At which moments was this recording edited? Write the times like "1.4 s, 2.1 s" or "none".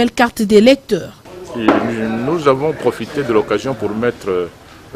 1.1 s